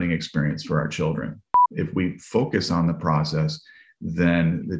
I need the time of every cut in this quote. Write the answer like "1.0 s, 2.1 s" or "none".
1.6 s